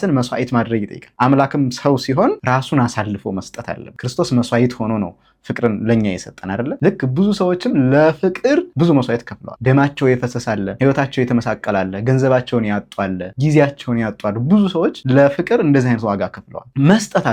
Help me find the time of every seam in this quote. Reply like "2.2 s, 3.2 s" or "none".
none